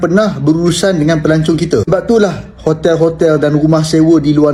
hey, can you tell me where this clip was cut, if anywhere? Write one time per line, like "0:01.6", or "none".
none